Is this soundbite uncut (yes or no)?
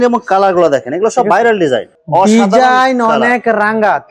no